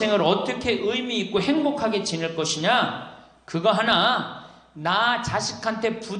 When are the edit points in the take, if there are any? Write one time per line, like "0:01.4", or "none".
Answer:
none